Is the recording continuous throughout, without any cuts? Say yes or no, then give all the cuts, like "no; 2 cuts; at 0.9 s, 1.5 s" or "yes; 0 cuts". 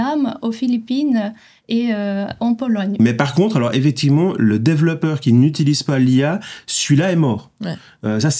no; 1 cut; at 3.0 s